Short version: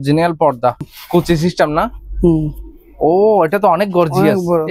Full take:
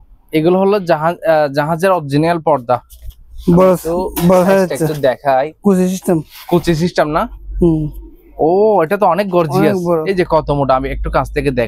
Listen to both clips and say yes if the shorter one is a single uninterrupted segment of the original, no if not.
no